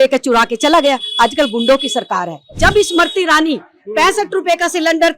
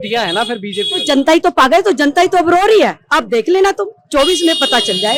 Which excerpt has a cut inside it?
first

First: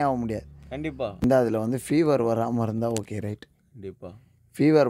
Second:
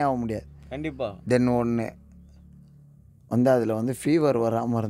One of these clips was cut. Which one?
first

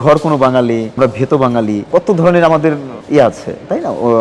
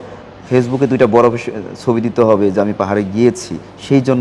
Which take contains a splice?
first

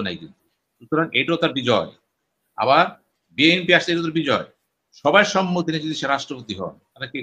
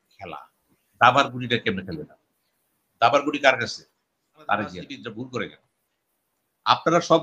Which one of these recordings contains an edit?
second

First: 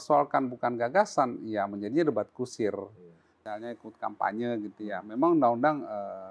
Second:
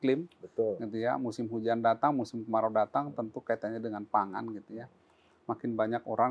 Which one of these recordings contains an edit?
first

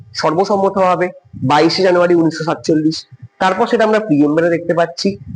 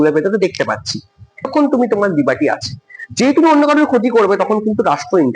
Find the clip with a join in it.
second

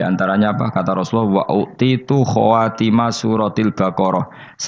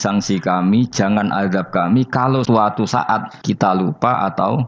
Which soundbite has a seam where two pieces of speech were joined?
second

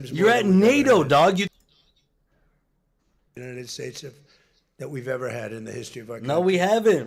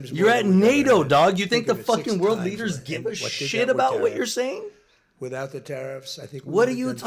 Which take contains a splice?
second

